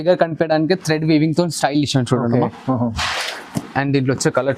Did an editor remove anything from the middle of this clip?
no; 0 cuts

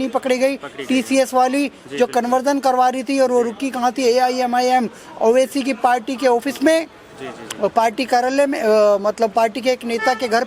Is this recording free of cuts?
yes; 0 cuts

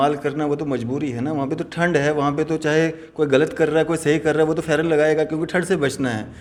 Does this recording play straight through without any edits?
yes; 0 cuts

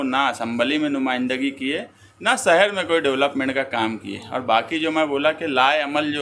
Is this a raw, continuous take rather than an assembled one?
yes; 0 cuts

